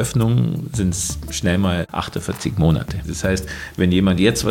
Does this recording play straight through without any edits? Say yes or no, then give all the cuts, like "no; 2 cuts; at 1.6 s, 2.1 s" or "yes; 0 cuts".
no; 2 cuts; at 1.9 s, 3.1 s